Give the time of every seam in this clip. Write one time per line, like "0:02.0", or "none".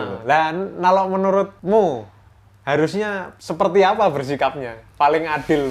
0:01.6
0:03.3